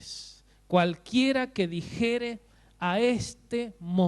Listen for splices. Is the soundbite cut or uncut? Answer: cut